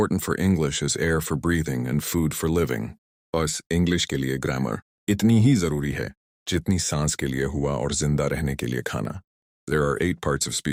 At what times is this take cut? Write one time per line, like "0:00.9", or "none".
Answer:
none